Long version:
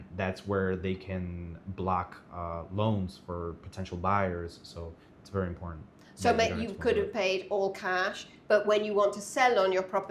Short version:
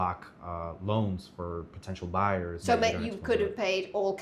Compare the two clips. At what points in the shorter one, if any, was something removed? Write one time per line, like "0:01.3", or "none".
0:02.6